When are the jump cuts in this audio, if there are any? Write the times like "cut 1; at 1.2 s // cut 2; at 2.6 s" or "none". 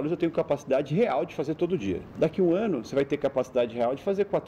cut 1; at 2.1 s